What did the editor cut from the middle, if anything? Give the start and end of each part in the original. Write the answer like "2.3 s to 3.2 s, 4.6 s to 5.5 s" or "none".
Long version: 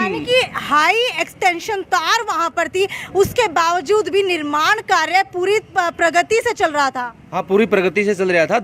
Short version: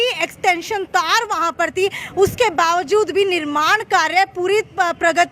none